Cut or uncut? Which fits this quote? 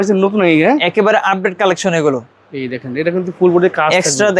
uncut